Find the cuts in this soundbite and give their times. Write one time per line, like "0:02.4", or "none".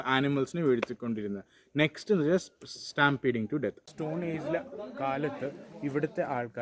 0:03.8